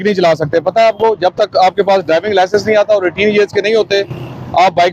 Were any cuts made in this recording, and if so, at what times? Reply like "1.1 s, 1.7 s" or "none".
none